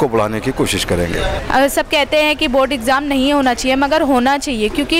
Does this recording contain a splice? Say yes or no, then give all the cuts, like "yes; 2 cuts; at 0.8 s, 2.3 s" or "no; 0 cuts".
yes; 1 cut; at 1.4 s